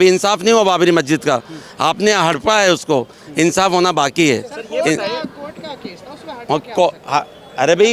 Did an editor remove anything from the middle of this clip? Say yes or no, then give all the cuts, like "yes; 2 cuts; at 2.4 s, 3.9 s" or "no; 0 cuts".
no; 0 cuts